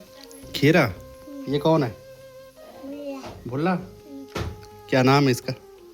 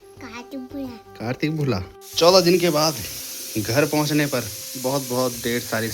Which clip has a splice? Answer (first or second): second